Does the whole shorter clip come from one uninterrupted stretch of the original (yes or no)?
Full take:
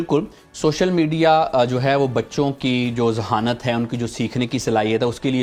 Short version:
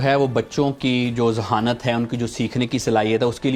yes